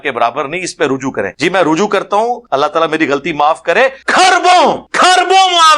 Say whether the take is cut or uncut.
cut